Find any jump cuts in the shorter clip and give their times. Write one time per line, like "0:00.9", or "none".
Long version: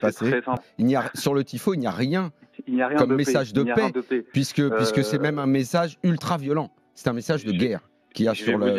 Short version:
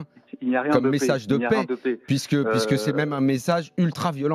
none